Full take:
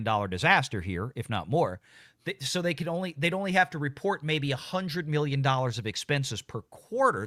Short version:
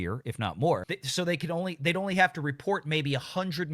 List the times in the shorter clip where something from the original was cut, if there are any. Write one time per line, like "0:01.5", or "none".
0:01.0